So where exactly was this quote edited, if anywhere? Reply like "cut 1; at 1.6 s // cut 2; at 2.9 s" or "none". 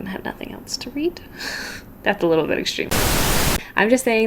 cut 1; at 3.3 s